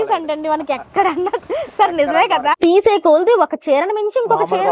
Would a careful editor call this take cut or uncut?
cut